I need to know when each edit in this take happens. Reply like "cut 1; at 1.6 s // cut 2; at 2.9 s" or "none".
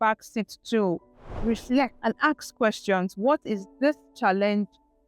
cut 1; at 1.9 s

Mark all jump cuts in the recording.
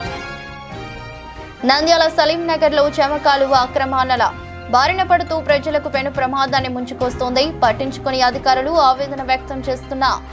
none

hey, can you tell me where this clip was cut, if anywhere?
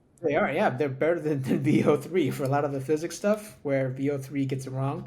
none

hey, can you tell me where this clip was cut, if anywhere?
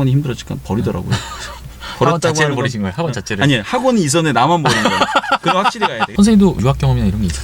cut 1; at 6.1 s

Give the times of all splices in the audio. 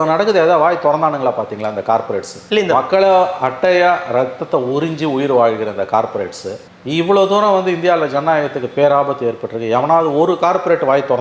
none

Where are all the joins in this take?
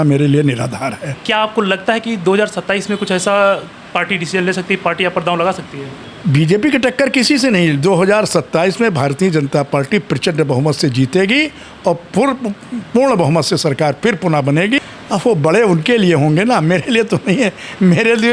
cut 1; at 1.1 s // cut 2; at 6.1 s // cut 3; at 14.8 s

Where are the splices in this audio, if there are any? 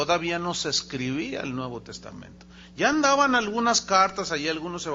none

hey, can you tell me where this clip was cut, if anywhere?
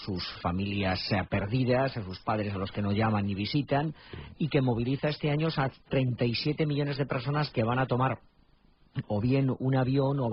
cut 1; at 6.1 s

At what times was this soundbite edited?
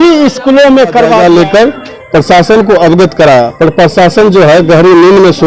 cut 1; at 1.2 s

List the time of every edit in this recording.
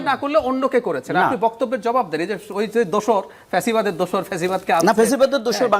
none

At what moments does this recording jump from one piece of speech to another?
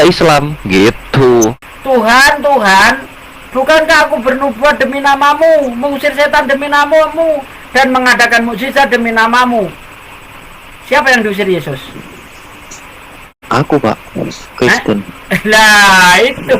cut 1; at 1.6 s // cut 2; at 13.4 s

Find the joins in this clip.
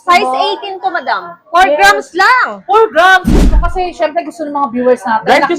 cut 1; at 3.4 s

